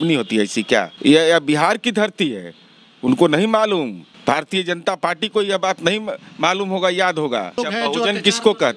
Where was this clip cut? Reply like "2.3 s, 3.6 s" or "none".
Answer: 0.9 s, 4.1 s, 7.6 s